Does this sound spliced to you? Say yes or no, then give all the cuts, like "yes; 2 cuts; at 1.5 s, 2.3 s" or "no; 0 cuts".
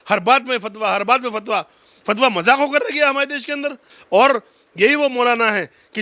yes; 1 cut; at 3.9 s